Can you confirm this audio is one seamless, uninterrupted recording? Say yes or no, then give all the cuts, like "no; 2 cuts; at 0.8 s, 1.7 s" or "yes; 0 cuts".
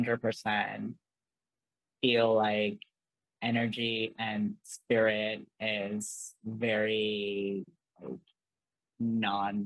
yes; 0 cuts